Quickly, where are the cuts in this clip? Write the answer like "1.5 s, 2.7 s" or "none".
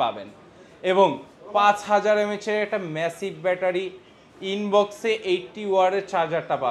none